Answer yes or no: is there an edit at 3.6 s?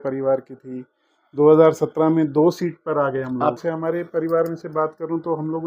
yes